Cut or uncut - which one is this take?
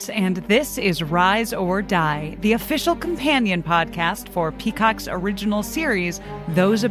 uncut